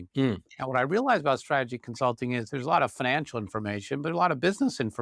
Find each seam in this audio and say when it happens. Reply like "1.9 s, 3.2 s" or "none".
none